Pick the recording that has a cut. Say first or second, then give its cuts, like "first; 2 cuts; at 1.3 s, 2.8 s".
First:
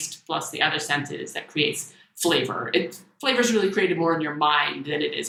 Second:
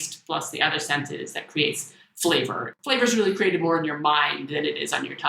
second; 1 cut; at 2.6 s